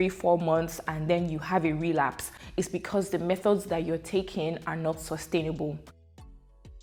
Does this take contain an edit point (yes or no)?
no